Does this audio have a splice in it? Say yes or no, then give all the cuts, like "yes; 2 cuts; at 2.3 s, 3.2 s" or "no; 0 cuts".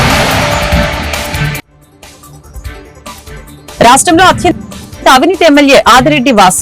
no; 0 cuts